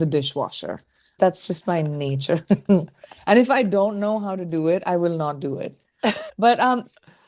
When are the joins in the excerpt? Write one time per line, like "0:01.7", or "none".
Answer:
0:01.2
0:06.3